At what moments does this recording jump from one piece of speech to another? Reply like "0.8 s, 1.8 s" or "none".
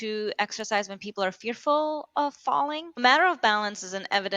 3.0 s